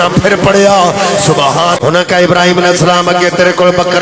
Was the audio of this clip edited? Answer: yes; 1 cut; at 1.8 s

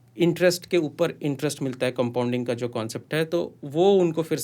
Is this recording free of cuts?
yes; 0 cuts

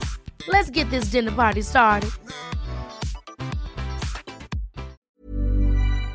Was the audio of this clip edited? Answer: yes; 1 cut; at 5.0 s

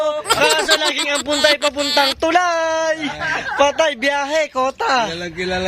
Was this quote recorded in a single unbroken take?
yes; 0 cuts

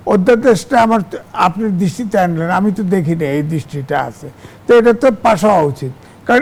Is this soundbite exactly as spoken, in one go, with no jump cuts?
yes; 0 cuts

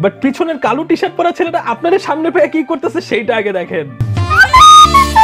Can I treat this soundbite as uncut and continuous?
yes; 0 cuts

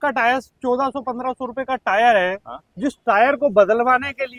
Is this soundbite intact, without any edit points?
yes; 0 cuts

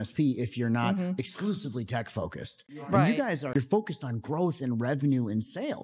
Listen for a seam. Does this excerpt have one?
yes; 1 cut; at 3.5 s

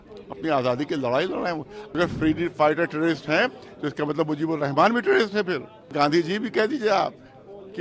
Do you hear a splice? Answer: yes; 2 cuts; at 2.0 s, 5.9 s

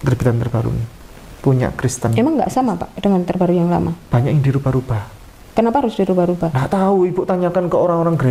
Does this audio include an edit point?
no; 0 cuts

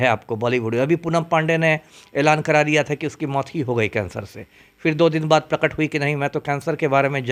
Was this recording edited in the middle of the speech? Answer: no; 0 cuts

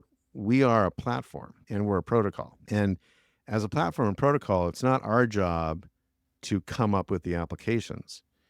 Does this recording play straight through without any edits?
yes; 0 cuts

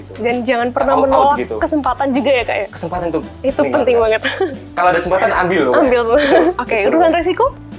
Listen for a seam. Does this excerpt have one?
yes; 1 cut; at 6.6 s

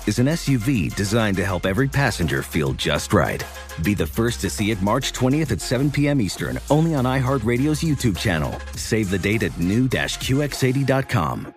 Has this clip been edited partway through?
no; 0 cuts

